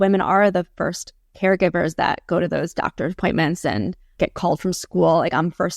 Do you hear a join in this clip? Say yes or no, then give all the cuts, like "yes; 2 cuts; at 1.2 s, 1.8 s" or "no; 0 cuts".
yes; 1 cut; at 4.1 s